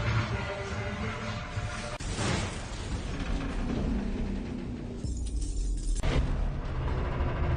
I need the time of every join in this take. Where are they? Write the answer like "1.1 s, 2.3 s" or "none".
none

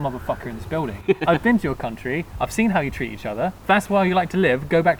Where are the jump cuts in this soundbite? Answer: 1.2 s, 3.6 s

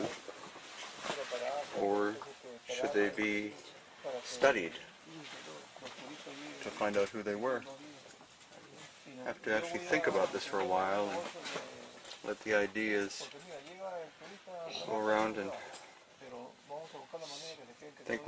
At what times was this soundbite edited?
15.6 s

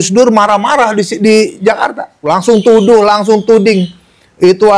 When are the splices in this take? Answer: 2.3 s

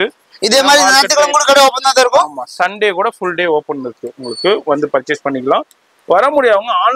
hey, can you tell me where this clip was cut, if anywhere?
none

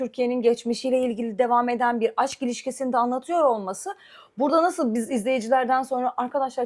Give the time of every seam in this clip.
none

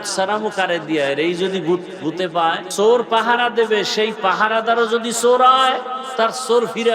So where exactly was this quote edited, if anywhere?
2.7 s, 6.0 s

